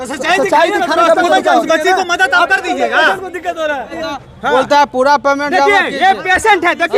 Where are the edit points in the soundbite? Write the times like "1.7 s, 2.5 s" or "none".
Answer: 3.9 s